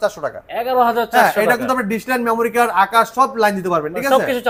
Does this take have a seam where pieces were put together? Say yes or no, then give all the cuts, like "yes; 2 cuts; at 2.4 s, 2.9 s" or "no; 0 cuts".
no; 0 cuts